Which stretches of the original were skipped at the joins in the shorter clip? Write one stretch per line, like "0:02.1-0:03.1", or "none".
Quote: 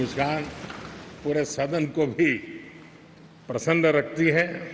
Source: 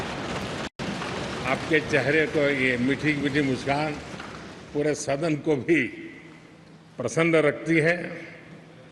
none

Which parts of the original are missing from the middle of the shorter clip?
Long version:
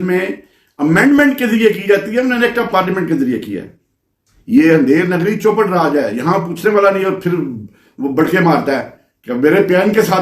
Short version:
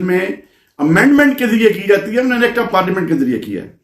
none

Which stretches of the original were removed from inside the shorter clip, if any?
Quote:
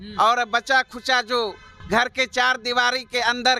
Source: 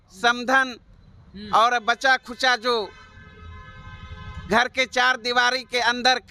0:03.0-0:04.3

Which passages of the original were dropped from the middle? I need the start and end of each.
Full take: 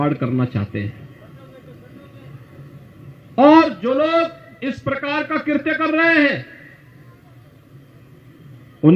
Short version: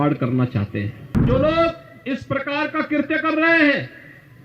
0:01.2-0:03.8

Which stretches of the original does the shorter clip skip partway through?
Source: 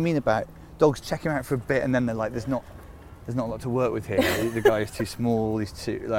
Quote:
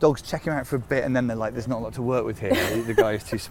0:02.4-0:03.3

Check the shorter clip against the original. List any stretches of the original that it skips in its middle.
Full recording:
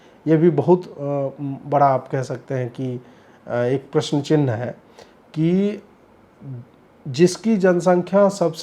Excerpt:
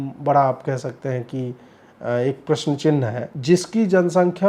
0:04.7-0:07.0

